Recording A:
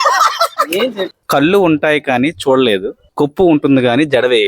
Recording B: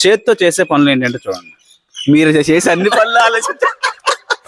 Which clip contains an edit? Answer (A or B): A